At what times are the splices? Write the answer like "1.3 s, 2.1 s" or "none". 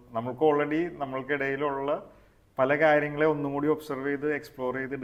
none